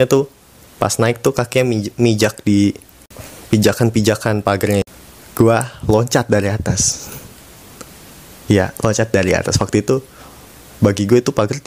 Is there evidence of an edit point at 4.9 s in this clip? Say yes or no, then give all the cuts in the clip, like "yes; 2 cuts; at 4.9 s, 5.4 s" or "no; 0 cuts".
yes; 1 cut; at 4.9 s